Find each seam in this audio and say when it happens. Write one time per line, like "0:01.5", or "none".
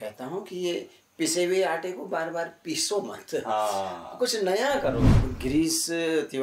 0:05.1